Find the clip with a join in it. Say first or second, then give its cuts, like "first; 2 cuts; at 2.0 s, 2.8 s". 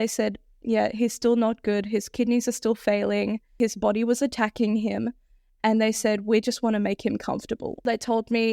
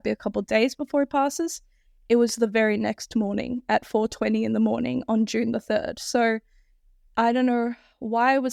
first; 2 cuts; at 3.6 s, 7.8 s